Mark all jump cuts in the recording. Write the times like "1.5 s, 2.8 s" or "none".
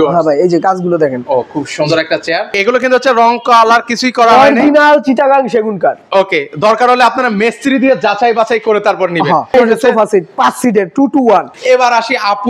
2.5 s, 9.5 s, 11.5 s